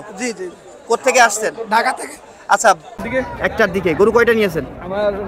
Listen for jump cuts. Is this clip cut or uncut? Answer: cut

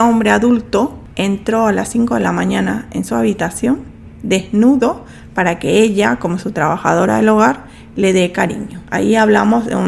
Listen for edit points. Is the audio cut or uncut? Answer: cut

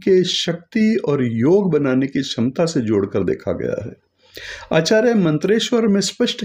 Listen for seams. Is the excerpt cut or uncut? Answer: uncut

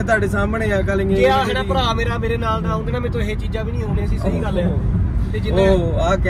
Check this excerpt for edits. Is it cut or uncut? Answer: uncut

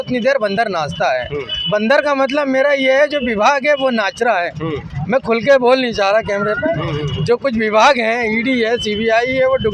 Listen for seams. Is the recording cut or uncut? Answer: uncut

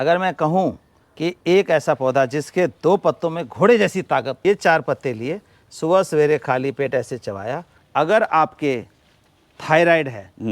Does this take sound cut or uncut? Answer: cut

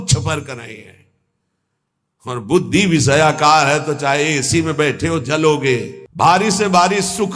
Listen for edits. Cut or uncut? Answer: cut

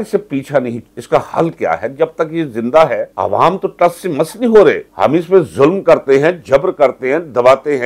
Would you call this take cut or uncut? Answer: uncut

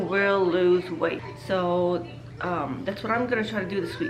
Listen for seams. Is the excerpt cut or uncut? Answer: cut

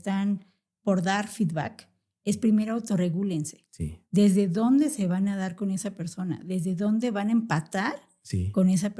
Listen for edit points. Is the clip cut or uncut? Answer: uncut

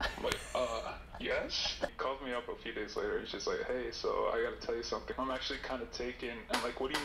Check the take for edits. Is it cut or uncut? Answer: cut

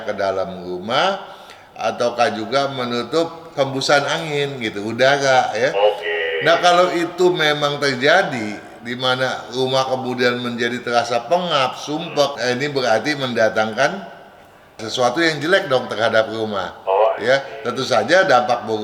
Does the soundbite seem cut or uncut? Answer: uncut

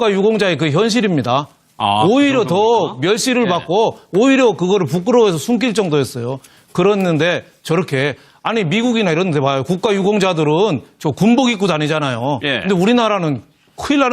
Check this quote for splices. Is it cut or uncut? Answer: cut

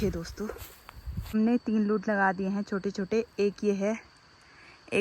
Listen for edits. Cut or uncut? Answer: cut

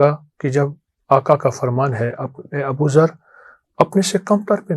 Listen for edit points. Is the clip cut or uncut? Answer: uncut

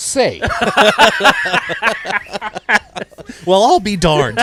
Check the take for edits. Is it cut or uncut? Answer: uncut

